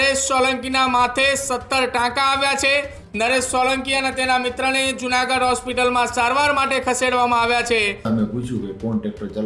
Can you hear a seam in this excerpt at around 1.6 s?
no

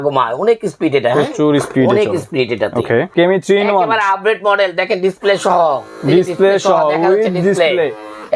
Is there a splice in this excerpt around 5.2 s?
no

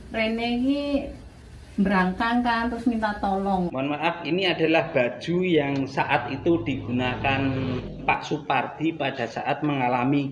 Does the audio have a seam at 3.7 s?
yes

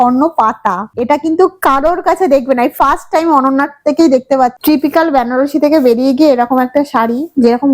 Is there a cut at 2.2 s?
no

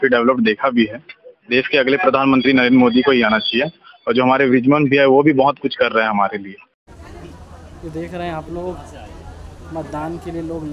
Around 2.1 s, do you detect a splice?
no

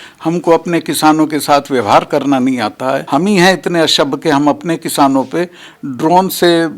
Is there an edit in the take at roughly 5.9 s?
no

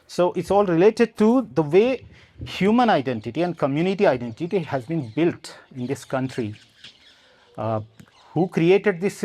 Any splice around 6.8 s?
no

